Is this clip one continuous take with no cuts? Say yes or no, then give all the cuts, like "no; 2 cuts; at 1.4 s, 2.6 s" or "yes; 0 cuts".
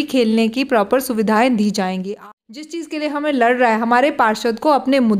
no; 1 cut; at 2.2 s